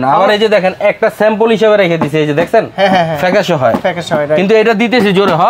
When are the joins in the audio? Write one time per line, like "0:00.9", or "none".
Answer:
none